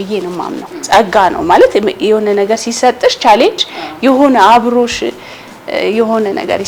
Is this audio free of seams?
yes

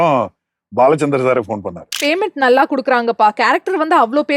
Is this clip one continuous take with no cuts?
no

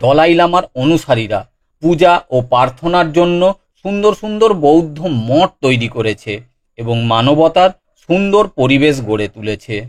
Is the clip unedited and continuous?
no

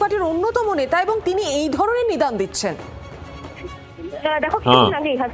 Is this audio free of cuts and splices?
yes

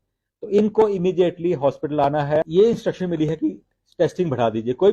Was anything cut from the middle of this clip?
yes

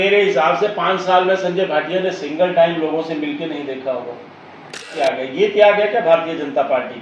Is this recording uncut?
no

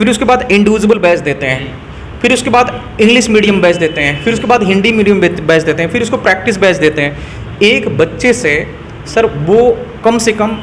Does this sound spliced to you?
no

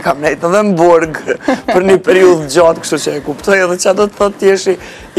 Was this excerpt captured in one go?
yes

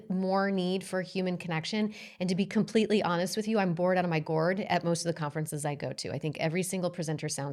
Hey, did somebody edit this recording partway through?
no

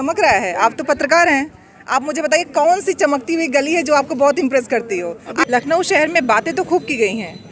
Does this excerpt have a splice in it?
yes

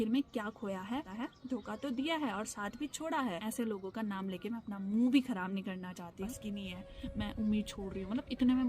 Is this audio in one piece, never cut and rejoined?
no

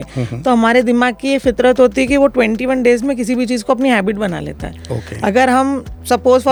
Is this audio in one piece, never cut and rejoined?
yes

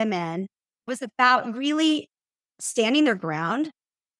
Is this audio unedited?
no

